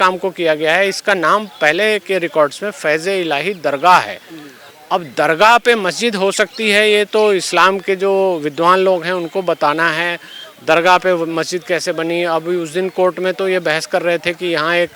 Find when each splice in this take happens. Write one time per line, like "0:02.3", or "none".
none